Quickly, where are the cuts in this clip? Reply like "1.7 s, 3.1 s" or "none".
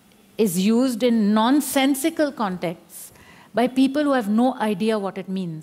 none